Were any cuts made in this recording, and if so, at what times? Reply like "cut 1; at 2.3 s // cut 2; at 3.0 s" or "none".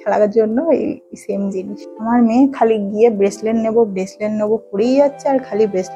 cut 1; at 1.7 s

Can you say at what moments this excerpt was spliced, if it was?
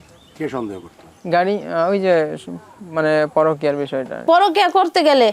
cut 1; at 4.1 s

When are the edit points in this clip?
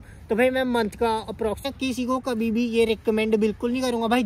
cut 1; at 1.6 s

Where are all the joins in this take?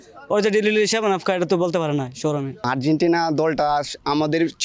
cut 1; at 2.7 s

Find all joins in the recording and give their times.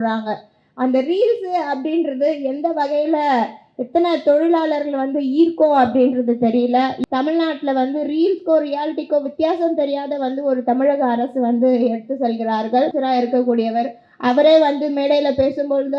cut 1; at 7.0 s // cut 2; at 12.9 s

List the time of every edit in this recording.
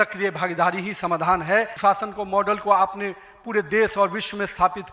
cut 1; at 1.7 s

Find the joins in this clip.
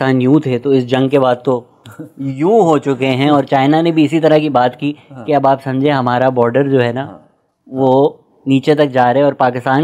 none

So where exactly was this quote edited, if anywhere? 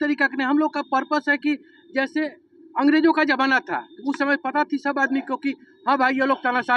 none

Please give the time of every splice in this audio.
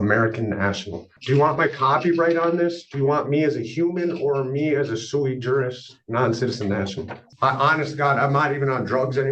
cut 1; at 1.2 s // cut 2; at 7.2 s

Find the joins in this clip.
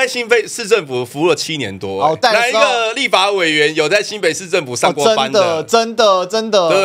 cut 1; at 2.2 s

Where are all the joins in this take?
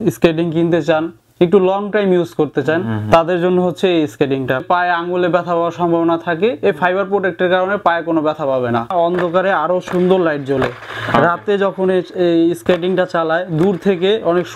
cut 1; at 4.6 s // cut 2; at 8.9 s

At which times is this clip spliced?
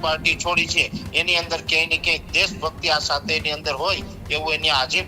none

